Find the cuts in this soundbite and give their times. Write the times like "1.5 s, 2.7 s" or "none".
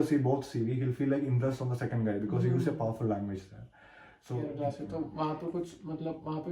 4.4 s